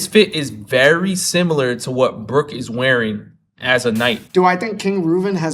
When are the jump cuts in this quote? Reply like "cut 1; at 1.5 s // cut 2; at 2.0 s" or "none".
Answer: cut 1; at 4.2 s